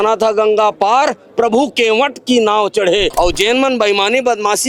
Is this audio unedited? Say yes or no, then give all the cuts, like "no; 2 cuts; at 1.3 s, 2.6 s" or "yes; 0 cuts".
no; 1 cut; at 3.1 s